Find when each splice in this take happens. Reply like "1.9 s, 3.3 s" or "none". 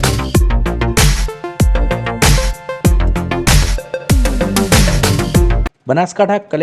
5.6 s